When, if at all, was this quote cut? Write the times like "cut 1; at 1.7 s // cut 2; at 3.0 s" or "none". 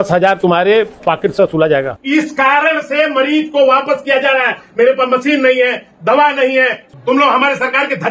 cut 1; at 0.9 s // cut 2; at 2.0 s // cut 3; at 6.9 s